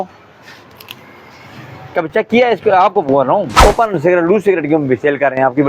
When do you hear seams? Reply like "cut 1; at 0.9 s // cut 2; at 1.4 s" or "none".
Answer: cut 1; at 3.7 s